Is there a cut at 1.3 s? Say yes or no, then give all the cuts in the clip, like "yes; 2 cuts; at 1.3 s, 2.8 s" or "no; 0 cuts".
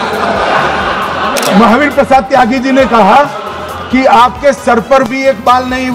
yes; 1 cut; at 1.3 s